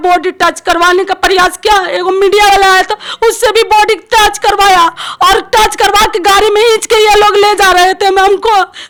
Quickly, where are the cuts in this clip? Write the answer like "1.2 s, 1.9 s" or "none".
none